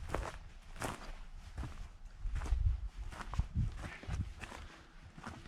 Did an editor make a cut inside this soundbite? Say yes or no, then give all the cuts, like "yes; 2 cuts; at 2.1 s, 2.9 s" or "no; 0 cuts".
no; 0 cuts